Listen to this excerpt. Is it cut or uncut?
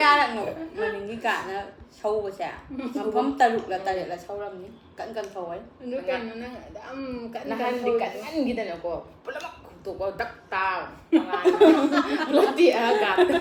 uncut